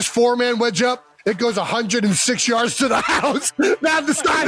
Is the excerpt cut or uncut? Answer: uncut